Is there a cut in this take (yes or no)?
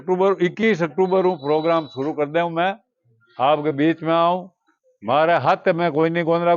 no